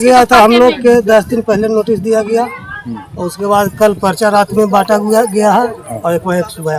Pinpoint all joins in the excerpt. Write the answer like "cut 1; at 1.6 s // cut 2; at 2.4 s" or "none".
none